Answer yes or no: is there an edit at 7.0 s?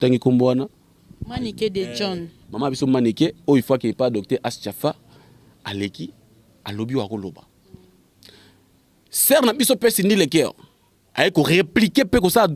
no